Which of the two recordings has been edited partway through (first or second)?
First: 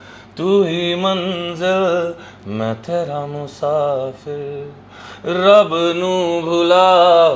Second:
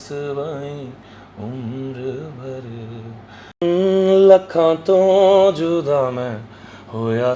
second